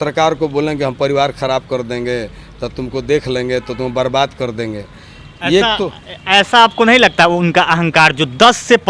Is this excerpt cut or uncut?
uncut